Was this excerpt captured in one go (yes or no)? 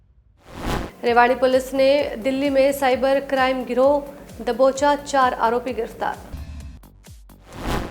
no